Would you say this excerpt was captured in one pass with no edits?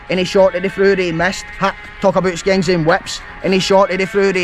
yes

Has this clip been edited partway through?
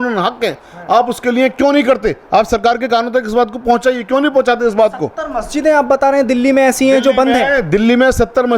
no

